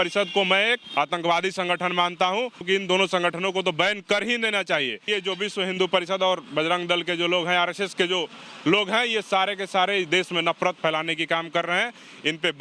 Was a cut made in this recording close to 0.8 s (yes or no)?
yes